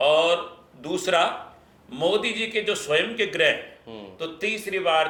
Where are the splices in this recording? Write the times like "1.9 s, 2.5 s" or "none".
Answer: none